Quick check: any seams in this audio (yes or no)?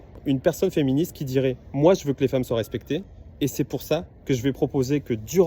no